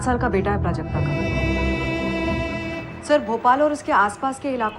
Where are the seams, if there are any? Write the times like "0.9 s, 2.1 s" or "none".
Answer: 1.2 s